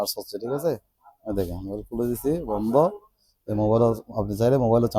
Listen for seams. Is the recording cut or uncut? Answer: uncut